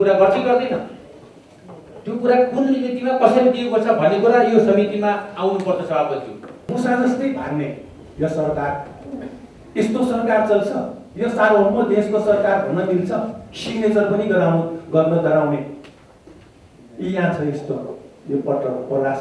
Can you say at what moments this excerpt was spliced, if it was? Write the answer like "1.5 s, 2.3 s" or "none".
6.6 s